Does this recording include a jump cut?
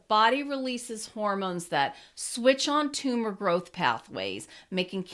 no; 0 cuts

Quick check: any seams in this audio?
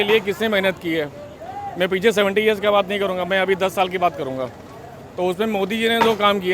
no; 0 cuts

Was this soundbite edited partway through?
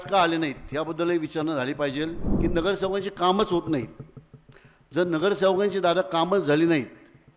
yes; 1 cut; at 2.2 s

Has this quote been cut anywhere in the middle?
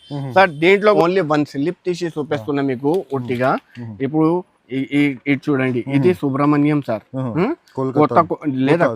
yes; 1 cut; at 1.0 s

